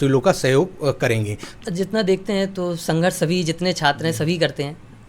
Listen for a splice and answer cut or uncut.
cut